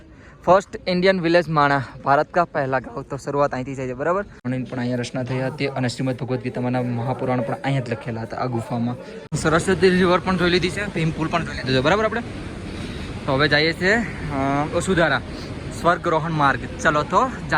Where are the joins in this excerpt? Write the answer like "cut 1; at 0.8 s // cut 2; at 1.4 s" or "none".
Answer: cut 1; at 4.4 s // cut 2; at 9.2 s

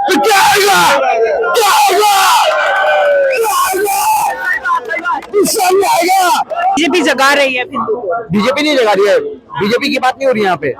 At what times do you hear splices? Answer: cut 1; at 6.8 s

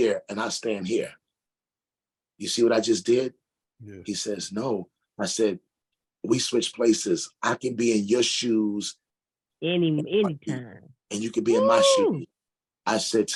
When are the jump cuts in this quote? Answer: none

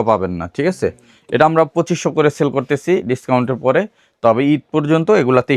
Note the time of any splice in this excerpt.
none

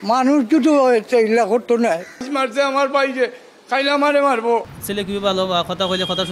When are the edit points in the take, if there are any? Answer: cut 1; at 2.3 s // cut 2; at 4.8 s

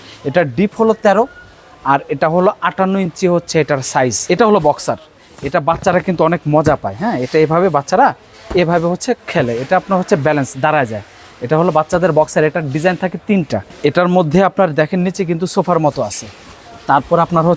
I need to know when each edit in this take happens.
cut 1; at 4.2 s // cut 2; at 13.7 s

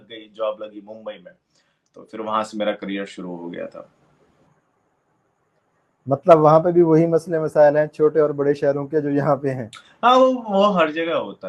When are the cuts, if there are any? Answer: none

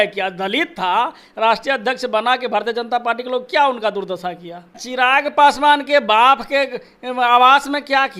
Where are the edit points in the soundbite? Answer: cut 1; at 4.8 s

